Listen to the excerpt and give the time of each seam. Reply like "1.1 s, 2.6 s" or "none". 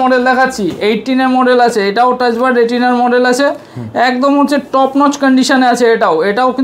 none